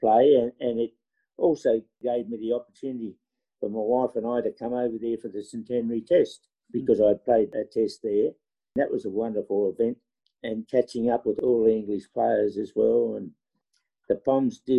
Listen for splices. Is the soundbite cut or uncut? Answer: cut